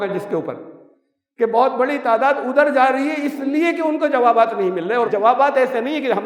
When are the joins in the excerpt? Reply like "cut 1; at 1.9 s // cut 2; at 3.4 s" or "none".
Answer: none